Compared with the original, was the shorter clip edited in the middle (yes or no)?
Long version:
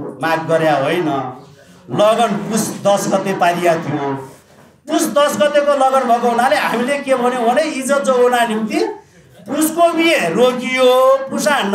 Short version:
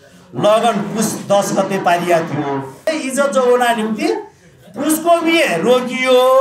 yes